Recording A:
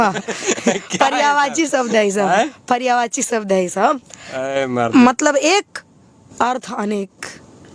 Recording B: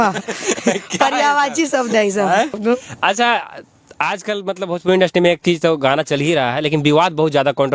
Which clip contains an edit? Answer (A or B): B